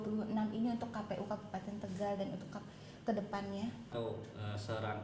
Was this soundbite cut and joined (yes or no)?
yes